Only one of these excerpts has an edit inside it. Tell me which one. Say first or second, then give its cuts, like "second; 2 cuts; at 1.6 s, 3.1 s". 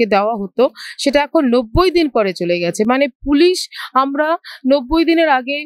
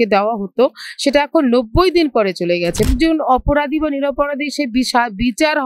second; 1 cut; at 2.9 s